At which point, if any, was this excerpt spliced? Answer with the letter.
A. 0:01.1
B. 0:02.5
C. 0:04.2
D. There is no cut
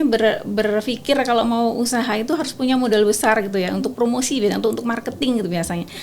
D